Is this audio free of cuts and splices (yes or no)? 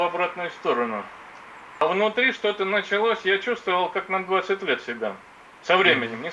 no